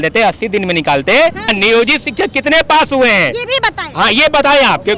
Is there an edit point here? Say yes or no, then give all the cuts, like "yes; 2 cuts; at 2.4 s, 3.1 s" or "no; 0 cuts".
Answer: yes; 1 cut; at 1.5 s